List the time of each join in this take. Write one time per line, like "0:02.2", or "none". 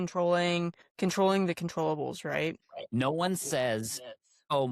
0:02.6